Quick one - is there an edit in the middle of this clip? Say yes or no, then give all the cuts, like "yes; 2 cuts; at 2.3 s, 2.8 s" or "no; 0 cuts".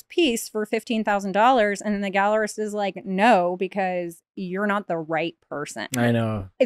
no; 0 cuts